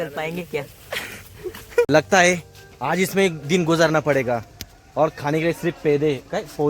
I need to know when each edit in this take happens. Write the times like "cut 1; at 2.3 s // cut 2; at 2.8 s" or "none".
cut 1; at 1.9 s

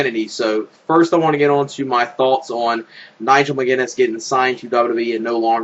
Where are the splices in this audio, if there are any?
cut 1; at 2.5 s

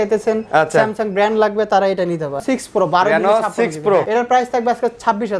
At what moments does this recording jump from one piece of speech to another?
cut 1; at 2.4 s // cut 2; at 4.1 s

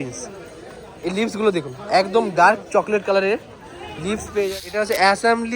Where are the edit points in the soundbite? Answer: cut 1; at 4.5 s

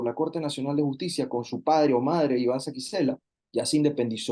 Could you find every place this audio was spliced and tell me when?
cut 1; at 3.3 s

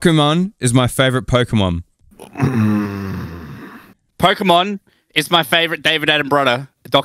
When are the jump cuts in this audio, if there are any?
cut 1; at 4.0 s

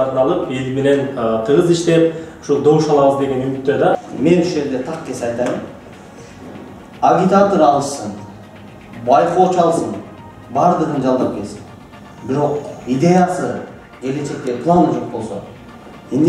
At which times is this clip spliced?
cut 1; at 4.0 s

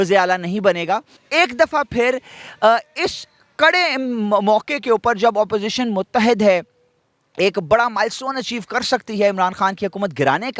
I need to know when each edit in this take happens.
cut 1; at 1.2 s

